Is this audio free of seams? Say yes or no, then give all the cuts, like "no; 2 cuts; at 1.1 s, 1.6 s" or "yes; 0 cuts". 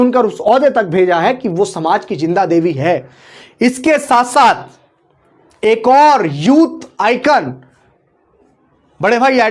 yes; 0 cuts